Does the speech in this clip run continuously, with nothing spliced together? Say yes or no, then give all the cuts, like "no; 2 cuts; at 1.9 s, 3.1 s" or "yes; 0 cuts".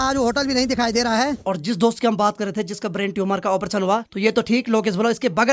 no; 2 cuts; at 1.4 s, 4.1 s